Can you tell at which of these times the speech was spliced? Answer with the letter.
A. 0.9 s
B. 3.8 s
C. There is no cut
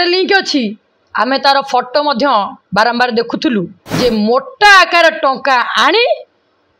B